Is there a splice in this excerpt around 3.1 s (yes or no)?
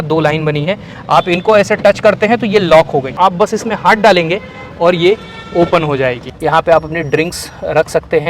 yes